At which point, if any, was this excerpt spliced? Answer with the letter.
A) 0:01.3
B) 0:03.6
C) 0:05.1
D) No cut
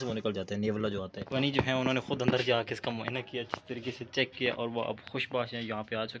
A